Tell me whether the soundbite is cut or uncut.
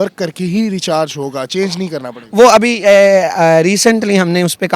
uncut